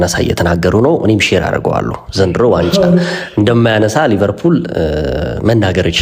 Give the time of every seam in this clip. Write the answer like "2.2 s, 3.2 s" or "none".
none